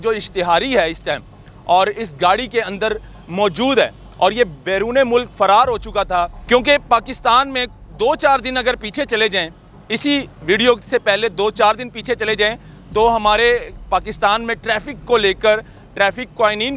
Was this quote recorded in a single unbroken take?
no; 1 cut; at 6.4 s

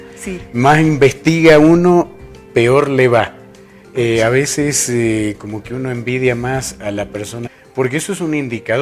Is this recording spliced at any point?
no; 0 cuts

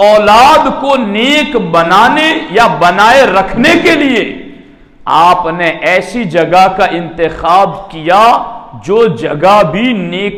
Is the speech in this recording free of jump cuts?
yes; 0 cuts

